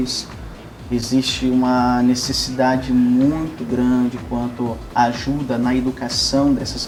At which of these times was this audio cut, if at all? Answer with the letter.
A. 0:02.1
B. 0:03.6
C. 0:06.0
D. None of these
D